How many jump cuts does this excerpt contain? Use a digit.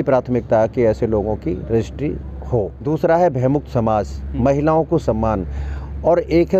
1